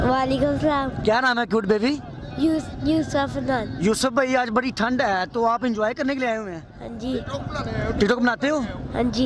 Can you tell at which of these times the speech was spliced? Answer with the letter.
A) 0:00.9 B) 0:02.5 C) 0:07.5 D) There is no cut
D